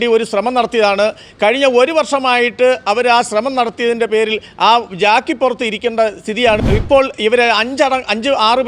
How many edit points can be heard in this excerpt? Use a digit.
1